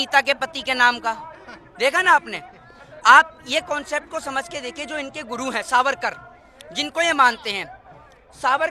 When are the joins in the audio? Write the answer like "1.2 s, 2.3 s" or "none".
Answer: none